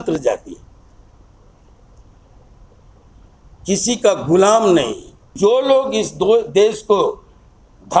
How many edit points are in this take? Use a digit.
1